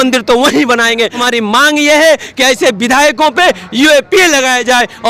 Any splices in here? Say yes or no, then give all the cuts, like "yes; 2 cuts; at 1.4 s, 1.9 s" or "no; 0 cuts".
yes; 1 cut; at 1.2 s